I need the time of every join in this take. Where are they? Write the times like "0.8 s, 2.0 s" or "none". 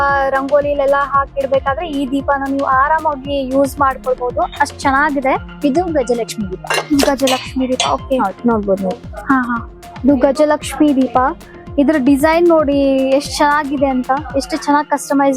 none